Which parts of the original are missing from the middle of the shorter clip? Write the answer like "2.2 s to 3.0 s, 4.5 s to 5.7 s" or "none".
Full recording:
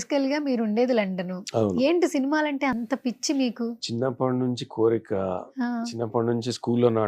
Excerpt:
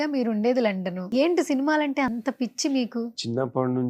1.4 s to 1.7 s

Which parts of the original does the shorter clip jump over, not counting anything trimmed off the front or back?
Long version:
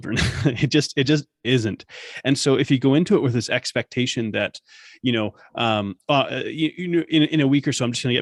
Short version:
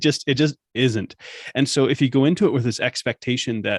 none

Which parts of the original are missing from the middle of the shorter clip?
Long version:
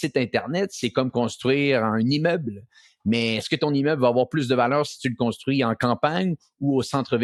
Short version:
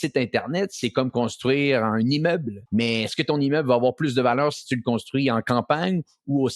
2.6 s to 2.9 s

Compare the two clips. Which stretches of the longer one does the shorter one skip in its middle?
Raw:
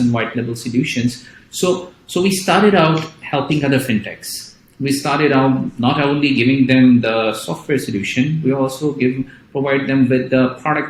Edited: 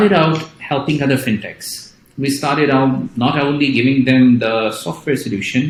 none

